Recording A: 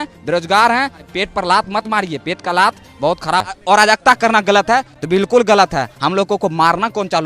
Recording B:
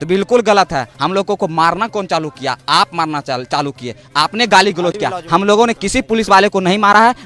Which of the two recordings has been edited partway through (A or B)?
A